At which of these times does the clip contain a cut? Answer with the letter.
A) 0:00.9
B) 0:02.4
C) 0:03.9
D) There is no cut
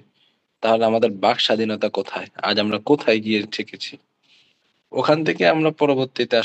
D